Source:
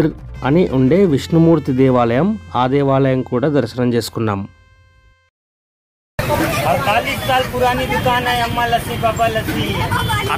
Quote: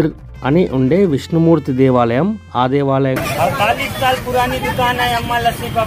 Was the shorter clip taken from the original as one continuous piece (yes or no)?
no